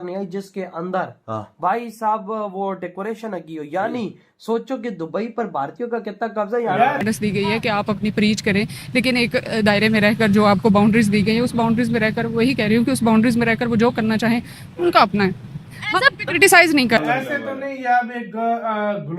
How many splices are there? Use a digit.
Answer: 2